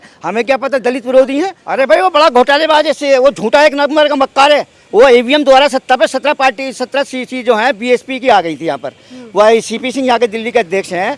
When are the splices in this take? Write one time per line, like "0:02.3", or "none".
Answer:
0:01.6